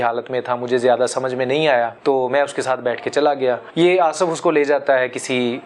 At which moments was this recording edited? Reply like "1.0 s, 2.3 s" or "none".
1.9 s, 3.6 s